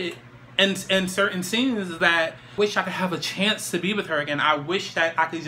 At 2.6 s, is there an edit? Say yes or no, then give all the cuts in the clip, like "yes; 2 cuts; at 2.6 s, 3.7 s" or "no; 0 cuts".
yes; 1 cut; at 2.6 s